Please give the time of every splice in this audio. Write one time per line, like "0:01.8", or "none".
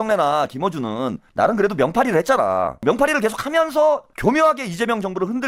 0:01.2
0:02.8
0:04.1

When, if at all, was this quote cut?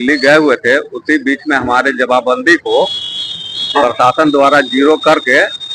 none

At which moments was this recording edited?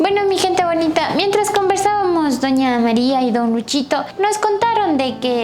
none

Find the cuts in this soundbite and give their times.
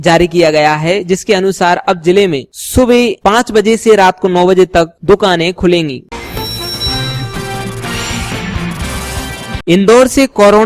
0:06.0
0:09.5

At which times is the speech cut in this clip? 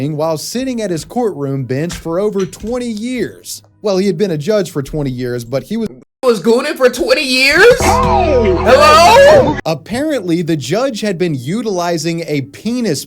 0:09.6

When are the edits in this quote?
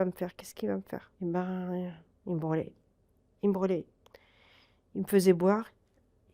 0:01.1

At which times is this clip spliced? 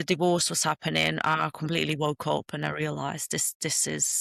none

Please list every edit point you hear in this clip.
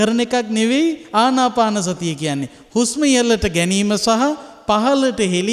0:01.0

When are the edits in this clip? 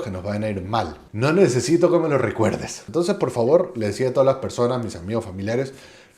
0:01.0
0:02.7

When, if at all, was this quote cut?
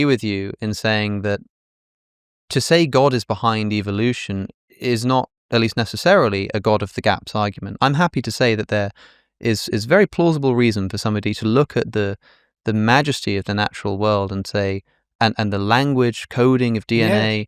none

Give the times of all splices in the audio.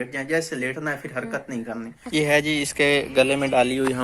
0:02.0

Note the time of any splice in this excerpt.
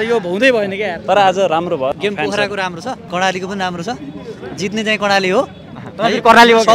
0:02.0
0:03.0

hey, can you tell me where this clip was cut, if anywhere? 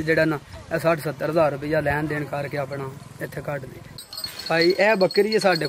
0:04.0

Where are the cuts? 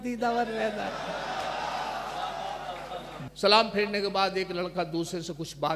0:03.1

